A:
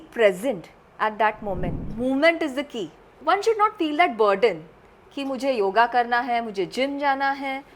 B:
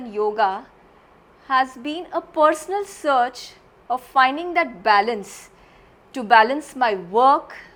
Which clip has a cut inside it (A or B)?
A